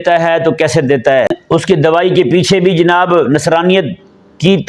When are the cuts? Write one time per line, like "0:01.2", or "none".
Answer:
0:01.4